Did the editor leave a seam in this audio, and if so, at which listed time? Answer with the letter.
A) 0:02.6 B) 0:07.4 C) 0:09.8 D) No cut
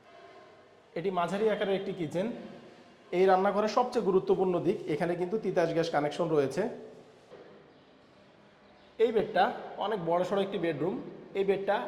B